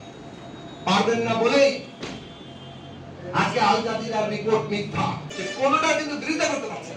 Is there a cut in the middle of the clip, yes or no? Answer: yes